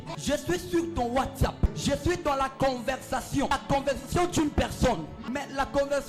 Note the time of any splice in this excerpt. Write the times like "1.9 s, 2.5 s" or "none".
1.7 s, 3.5 s, 5.2 s